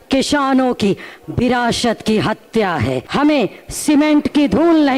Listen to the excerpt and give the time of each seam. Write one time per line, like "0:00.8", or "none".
0:03.0